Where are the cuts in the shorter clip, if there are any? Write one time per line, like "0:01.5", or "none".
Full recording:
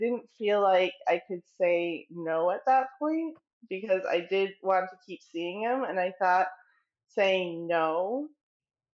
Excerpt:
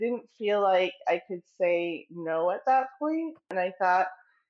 0:03.5